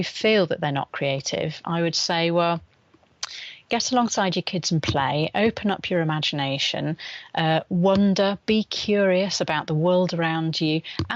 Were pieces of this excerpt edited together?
no; 0 cuts

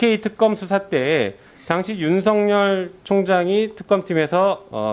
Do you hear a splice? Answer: no; 0 cuts

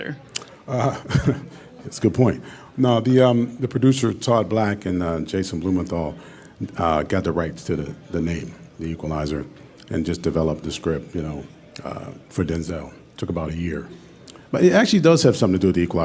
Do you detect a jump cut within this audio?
no; 0 cuts

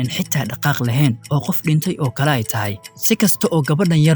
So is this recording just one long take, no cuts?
yes; 0 cuts

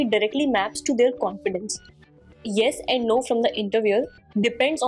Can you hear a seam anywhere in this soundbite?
yes; 1 cut; at 2.4 s

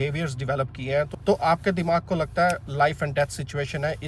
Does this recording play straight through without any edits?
no; 1 cut; at 1.1 s

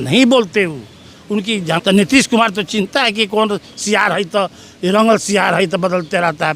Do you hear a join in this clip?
yes; 1 cut; at 1.8 s

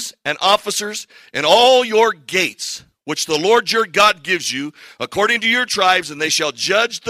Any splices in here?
no; 0 cuts

